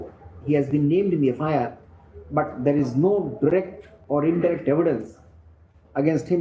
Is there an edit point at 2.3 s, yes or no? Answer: no